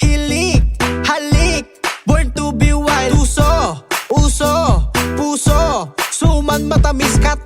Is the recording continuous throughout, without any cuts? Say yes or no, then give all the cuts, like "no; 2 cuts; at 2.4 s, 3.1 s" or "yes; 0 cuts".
no; 1 cut; at 4.5 s